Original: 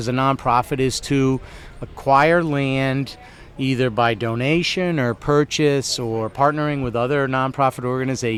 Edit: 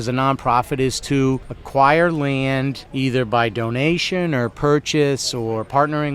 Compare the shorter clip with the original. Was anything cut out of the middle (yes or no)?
yes